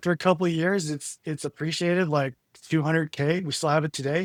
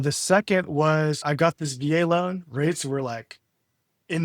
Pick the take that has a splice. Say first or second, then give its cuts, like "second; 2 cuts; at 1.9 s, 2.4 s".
second; 1 cut; at 1.2 s